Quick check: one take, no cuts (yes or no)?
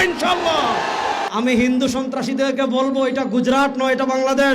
no